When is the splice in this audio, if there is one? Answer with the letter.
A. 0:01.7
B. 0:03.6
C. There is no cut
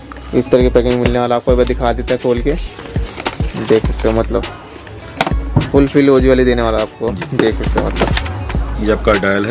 C